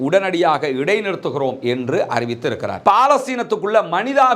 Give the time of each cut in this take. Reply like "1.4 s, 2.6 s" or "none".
2.7 s